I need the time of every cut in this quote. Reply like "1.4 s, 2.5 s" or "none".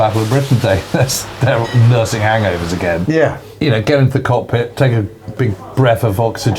3.4 s, 5.4 s